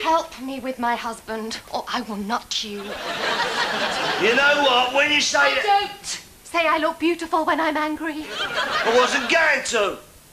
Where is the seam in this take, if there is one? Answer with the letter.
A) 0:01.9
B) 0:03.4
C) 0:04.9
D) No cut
C